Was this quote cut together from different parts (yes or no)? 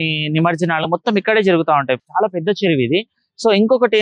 no